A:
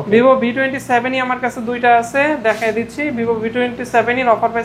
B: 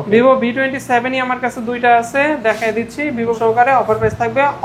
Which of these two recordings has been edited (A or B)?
B